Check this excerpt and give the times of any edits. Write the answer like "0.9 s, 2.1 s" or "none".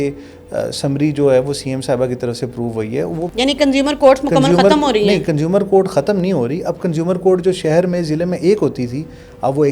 3.3 s